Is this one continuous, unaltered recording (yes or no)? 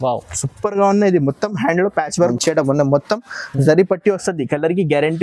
no